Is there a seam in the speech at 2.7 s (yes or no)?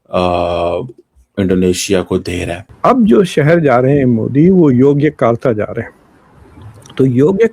yes